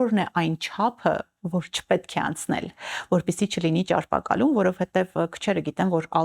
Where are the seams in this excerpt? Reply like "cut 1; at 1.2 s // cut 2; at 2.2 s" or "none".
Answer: none